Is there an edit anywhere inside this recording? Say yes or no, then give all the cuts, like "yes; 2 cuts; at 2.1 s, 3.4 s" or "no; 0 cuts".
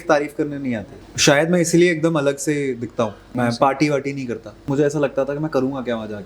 yes; 3 cuts; at 0.9 s, 3.3 s, 4.7 s